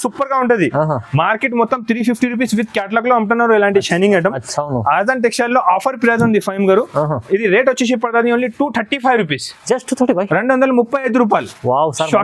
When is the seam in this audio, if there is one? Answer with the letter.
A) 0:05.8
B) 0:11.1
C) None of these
C